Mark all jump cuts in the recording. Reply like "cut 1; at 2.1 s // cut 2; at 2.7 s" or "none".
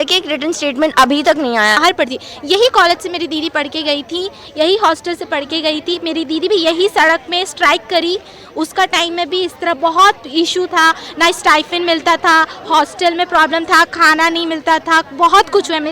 cut 1; at 1.8 s